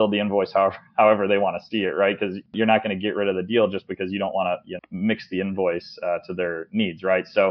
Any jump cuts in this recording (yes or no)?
yes